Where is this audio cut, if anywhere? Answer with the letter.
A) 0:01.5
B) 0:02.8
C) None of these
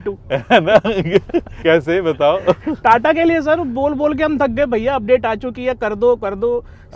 A